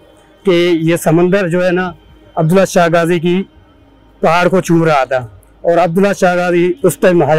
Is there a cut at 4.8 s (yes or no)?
no